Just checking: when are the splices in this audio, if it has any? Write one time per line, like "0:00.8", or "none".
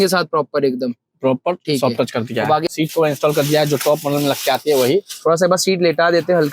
0:02.7